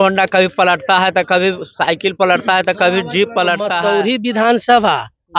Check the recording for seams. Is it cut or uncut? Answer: cut